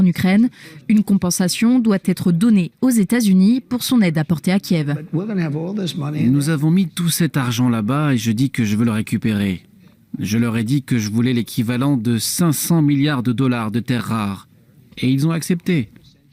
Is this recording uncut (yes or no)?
yes